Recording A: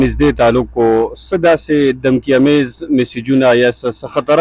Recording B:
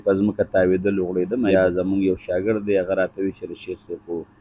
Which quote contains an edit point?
B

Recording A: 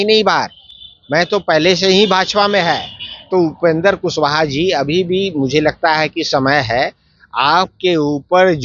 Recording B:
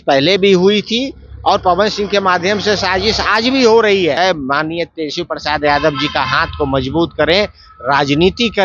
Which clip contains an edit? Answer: B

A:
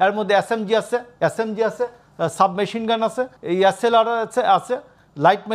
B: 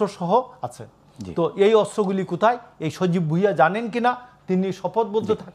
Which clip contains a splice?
A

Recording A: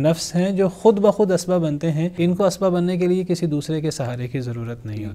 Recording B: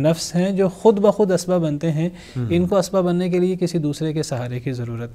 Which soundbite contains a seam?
A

